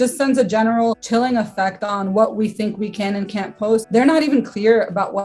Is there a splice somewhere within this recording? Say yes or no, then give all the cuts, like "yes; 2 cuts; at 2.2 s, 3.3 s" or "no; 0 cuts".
yes; 2 cuts; at 1.0 s, 3.9 s